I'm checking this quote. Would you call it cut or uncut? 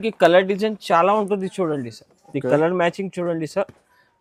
uncut